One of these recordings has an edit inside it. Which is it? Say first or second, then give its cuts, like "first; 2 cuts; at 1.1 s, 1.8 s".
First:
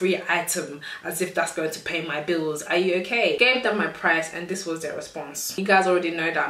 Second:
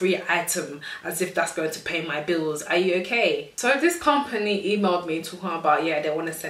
first; 2 cuts; at 3.4 s, 5.6 s